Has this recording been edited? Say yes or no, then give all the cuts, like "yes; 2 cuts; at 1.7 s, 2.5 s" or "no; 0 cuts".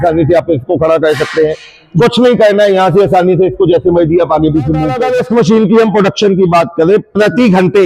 yes; 1 cut; at 5.0 s